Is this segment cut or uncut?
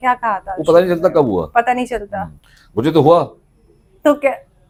uncut